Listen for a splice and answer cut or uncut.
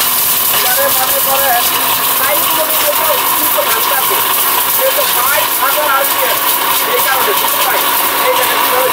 uncut